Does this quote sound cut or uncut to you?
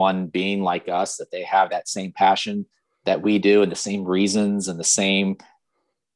uncut